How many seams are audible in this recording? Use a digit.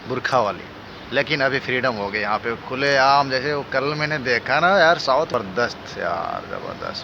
1